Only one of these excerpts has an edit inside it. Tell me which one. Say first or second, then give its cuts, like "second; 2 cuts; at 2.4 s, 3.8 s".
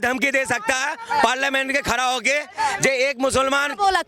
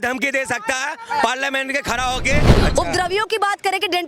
second; 1 cut; at 2.5 s